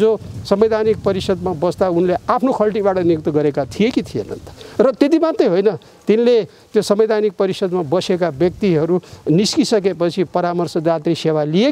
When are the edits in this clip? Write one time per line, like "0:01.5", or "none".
none